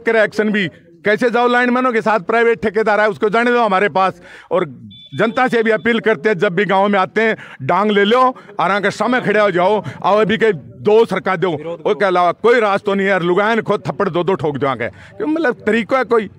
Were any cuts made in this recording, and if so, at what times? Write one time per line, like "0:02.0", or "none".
none